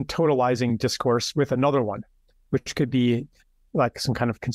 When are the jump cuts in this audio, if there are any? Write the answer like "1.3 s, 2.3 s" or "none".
none